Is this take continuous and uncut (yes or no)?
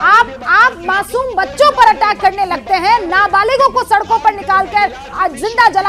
yes